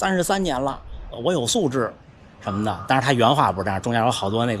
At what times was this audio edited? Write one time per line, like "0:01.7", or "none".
0:01.1